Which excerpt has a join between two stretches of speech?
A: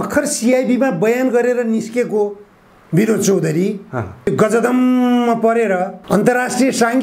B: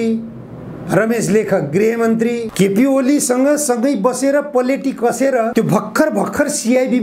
B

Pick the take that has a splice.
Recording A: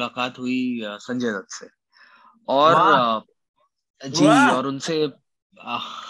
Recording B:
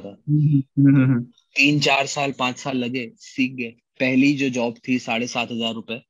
B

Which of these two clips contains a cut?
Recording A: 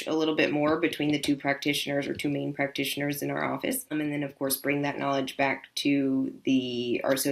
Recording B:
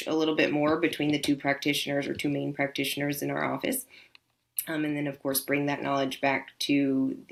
A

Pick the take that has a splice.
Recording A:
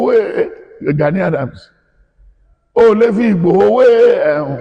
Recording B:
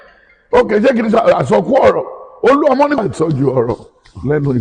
B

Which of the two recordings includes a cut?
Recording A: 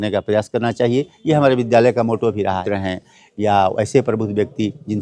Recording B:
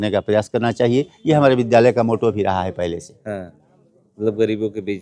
A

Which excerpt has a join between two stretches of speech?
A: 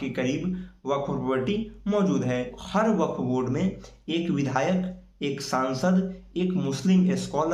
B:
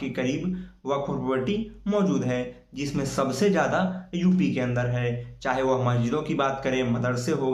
A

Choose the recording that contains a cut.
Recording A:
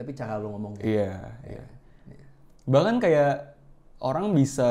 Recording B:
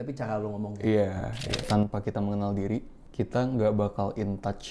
B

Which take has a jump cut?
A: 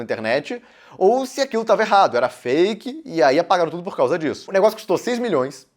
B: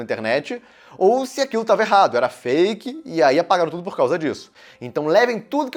A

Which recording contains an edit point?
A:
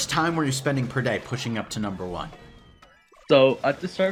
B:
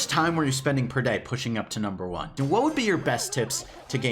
B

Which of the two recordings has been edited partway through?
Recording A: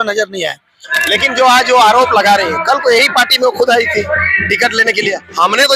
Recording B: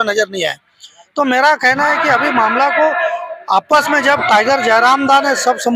A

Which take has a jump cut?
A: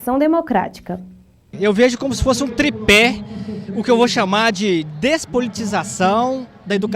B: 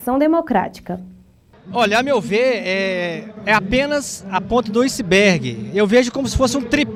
A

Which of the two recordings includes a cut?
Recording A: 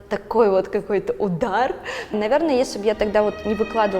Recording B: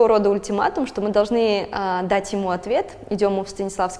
A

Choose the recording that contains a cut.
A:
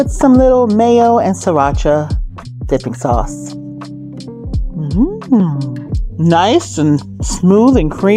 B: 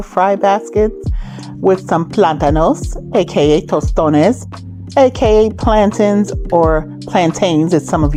A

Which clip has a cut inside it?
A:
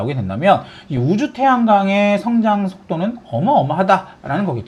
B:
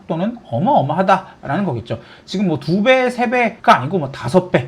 B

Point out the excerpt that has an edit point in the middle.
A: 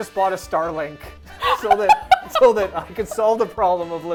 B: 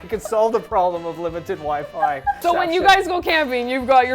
B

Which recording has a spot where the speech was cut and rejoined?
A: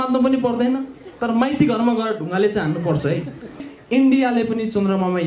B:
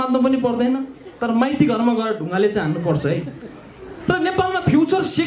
A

